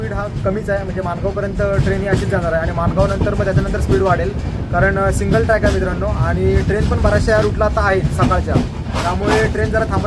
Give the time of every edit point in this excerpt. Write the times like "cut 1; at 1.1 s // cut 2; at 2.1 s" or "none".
none